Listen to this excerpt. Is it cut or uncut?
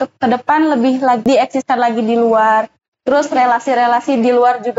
cut